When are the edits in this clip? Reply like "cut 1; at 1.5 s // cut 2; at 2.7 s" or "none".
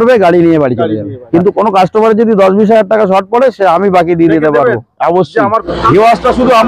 cut 1; at 1.2 s // cut 2; at 5.7 s